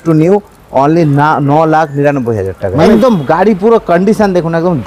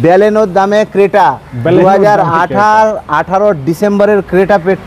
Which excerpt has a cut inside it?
first; 1 cut; at 2.9 s

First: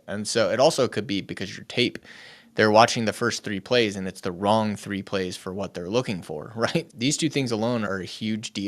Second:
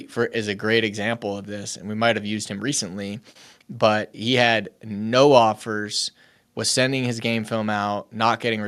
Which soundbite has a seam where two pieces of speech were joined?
first; 2 cuts; at 6.9 s, 7.9 s

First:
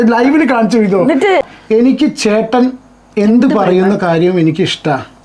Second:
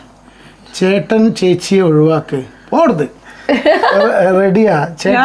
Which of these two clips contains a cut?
first; 1 cut; at 1.4 s

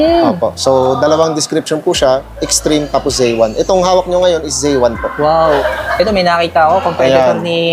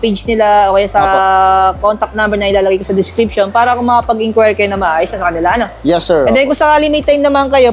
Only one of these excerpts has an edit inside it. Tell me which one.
first; 1 cut; at 5.6 s

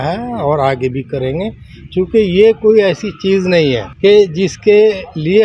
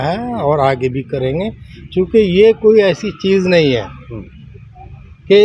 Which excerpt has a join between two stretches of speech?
first; 1 cut; at 3.9 s

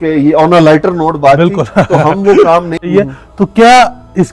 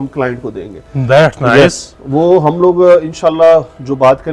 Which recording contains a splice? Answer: first; 1 cut; at 2.8 s

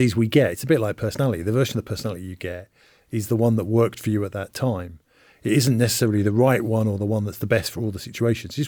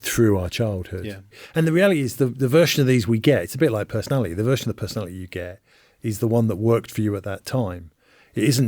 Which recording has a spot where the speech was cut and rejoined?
second; 1 cut; at 1.4 s

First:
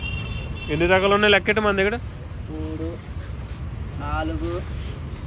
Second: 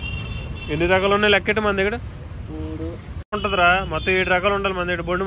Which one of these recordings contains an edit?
second; 1 cut; at 3.4 s

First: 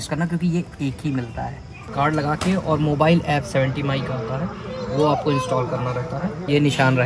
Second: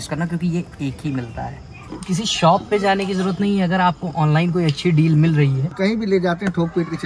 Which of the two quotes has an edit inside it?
second; 2 cuts; at 1.8 s, 5.7 s

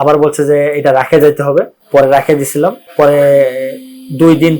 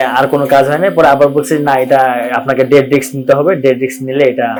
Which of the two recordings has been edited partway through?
first; 2 cuts; at 1.8 s, 2.8 s

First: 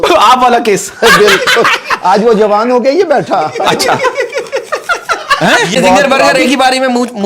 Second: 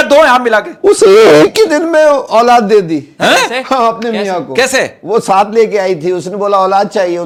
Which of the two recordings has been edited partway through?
first; 1 cut; at 5.8 s

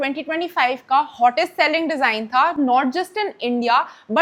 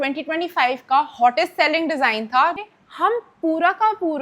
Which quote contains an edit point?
second; 1 cut; at 2.5 s

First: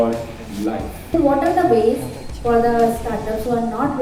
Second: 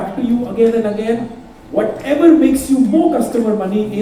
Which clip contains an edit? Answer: first; 1 cut; at 1.0 s

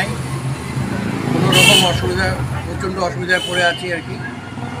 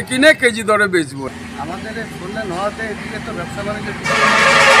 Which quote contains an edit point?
second; 1 cut; at 1.3 s

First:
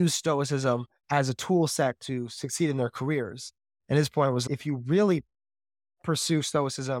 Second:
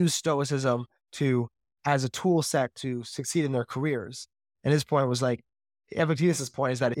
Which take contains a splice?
first; 2 cuts; at 0.9 s, 4.5 s

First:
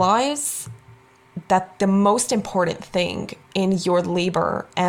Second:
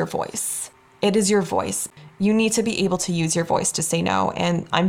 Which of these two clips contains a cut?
second; 1 cut; at 1.9 s

